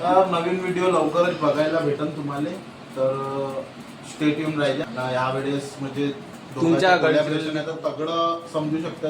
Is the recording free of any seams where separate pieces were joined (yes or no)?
no